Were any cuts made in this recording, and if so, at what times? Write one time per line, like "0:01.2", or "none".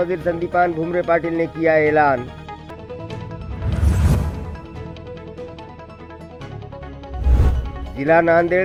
none